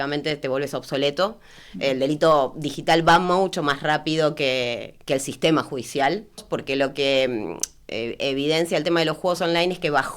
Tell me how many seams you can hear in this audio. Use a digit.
1